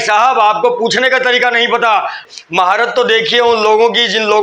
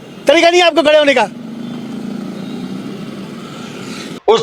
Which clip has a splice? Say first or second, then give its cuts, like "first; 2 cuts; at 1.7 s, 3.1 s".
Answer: first; 1 cut; at 2.3 s